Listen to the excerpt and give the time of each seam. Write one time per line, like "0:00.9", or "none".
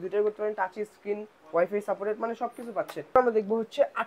0:03.2